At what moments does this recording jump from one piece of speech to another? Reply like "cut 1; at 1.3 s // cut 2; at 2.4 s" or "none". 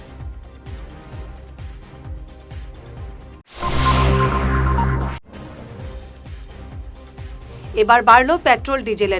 cut 1; at 6.8 s